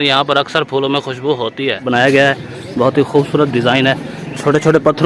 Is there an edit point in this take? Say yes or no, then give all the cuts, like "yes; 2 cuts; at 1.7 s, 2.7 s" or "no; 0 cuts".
yes; 1 cut; at 1.9 s